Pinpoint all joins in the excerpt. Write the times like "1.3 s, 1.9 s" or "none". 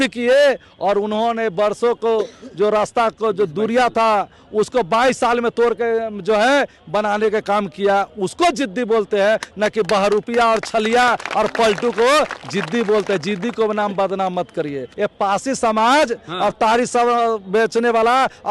14.8 s